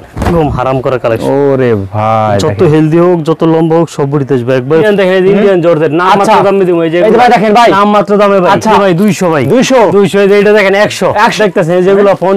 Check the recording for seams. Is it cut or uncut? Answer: cut